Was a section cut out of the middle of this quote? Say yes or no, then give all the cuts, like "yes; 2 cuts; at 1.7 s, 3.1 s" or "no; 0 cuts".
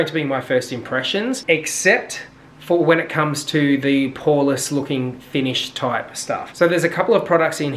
no; 0 cuts